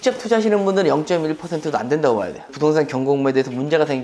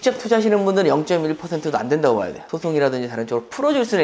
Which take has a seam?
second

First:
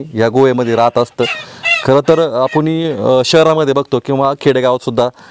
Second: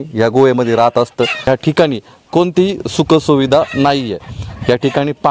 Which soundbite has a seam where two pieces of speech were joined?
second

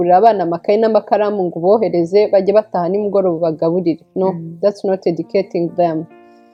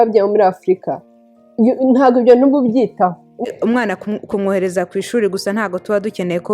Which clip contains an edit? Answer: second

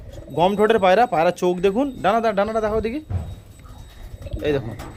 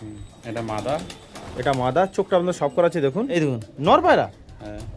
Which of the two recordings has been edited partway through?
second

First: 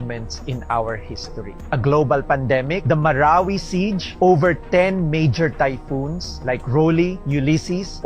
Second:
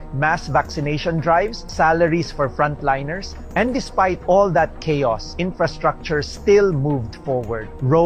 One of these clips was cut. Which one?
first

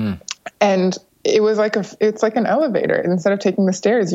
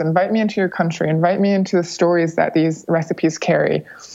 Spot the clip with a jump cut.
first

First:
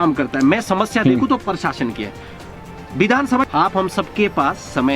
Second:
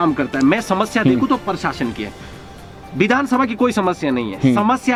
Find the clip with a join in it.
first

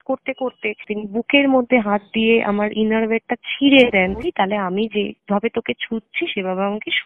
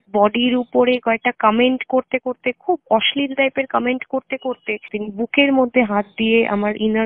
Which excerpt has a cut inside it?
first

